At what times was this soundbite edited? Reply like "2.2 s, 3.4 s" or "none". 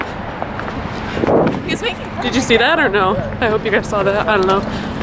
none